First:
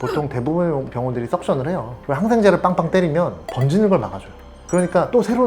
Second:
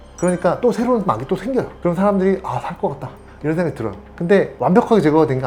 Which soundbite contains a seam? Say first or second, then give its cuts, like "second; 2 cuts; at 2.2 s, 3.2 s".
first; 2 cuts; at 1.9 s, 3.4 s